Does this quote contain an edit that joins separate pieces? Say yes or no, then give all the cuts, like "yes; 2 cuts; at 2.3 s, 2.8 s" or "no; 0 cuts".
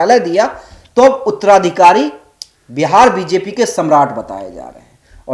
no; 0 cuts